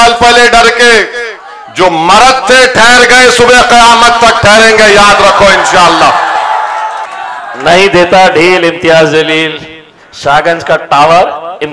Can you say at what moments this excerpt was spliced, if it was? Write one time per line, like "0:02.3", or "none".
0:07.1

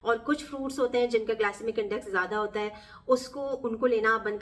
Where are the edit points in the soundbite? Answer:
none

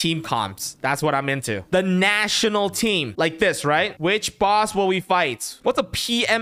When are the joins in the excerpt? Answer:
0:03.1
0:03.9
0:05.5

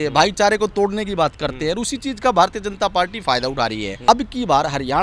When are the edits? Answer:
0:04.1

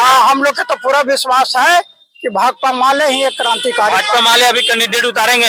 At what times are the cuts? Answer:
none

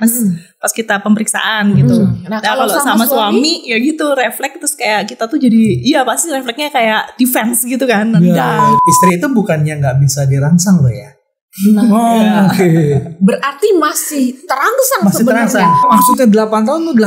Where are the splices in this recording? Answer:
0:08.8
0:15.8

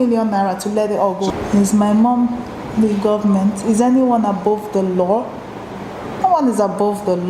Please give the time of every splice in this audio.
0:01.3

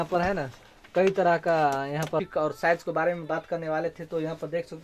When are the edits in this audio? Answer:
0:02.3

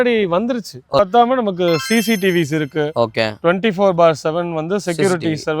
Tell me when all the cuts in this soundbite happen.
0:01.0

